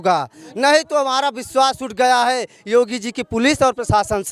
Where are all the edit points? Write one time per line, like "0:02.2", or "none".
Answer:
none